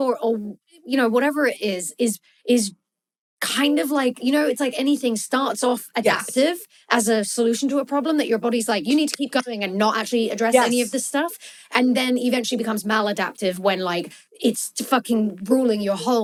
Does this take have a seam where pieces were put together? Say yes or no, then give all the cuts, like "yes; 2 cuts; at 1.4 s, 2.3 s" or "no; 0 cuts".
no; 0 cuts